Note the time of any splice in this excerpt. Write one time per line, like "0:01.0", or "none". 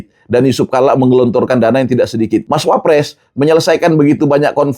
0:02.4